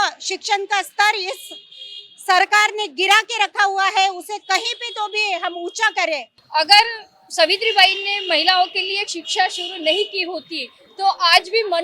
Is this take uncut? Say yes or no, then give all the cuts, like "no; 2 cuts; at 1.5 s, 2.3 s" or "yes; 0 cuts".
no; 1 cut; at 6.3 s